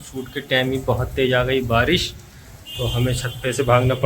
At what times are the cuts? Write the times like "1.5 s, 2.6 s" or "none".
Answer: none